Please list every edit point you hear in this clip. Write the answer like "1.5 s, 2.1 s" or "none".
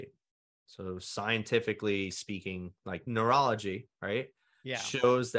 3.0 s